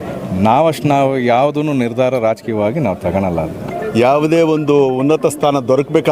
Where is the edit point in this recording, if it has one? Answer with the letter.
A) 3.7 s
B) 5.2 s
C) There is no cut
A